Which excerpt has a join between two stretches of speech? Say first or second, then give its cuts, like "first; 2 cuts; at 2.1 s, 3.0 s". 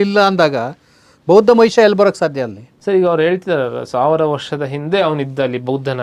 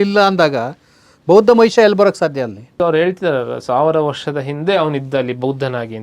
second; 1 cut; at 2.8 s